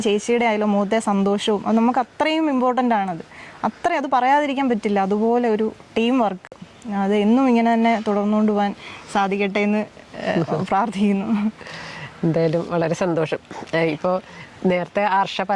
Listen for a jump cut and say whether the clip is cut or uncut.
uncut